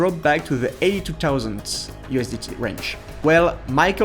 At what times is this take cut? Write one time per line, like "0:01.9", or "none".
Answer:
0:03.1